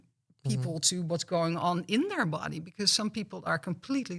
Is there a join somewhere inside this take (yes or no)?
no